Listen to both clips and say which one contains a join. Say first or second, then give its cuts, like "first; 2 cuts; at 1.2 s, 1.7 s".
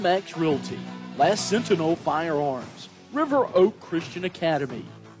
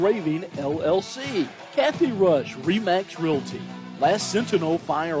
second; 1 cut; at 1.6 s